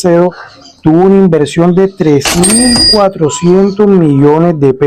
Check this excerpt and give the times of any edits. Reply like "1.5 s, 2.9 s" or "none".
none